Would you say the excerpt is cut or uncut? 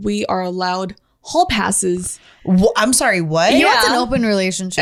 uncut